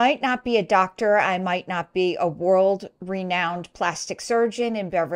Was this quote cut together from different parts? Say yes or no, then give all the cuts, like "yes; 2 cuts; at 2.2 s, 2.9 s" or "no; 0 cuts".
no; 0 cuts